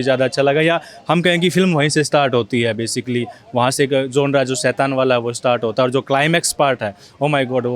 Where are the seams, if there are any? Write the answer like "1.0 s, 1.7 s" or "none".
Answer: none